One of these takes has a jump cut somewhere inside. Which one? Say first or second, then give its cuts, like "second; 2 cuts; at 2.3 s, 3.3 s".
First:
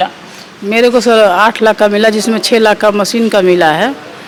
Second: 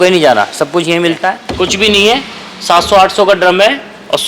second; 1 cut; at 1.4 s